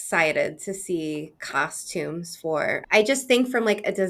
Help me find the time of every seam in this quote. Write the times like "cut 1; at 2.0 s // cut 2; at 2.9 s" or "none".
cut 1; at 2.8 s

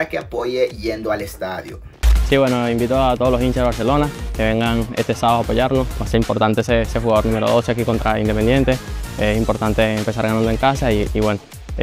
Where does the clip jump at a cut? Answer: none

